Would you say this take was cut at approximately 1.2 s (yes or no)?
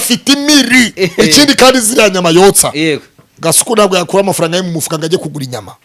yes